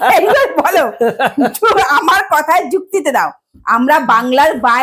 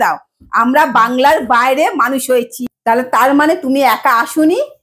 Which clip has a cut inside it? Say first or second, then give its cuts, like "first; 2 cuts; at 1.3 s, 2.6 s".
second; 1 cut; at 2.6 s